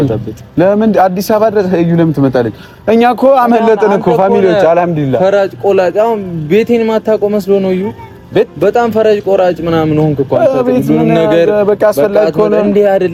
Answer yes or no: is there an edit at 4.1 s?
no